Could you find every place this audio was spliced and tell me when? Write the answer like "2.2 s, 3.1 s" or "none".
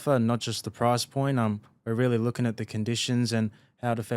none